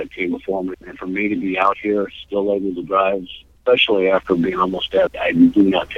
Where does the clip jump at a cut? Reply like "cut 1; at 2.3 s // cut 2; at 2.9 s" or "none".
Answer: cut 1; at 5.1 s